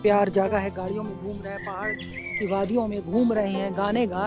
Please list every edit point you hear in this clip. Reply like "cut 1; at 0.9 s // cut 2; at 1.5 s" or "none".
none